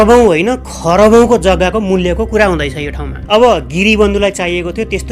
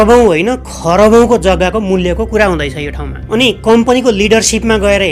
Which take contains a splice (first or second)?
first